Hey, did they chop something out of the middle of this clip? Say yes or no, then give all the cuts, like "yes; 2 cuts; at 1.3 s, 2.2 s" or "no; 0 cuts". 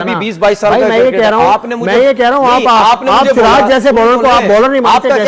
no; 0 cuts